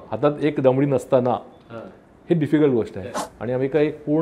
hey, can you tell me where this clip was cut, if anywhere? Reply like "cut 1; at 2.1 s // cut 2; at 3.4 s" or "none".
cut 1; at 3.0 s